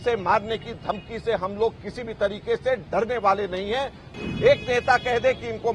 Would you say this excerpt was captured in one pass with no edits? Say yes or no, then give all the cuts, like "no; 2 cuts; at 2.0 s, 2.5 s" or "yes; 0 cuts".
no; 1 cut; at 4.0 s